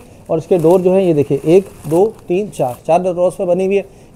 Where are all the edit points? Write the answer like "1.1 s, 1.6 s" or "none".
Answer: none